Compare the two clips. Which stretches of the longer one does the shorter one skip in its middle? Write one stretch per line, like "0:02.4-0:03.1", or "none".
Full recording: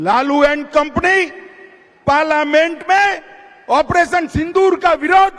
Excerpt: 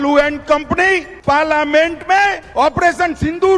0:01.4-0:01.9
0:03.2-0:03.5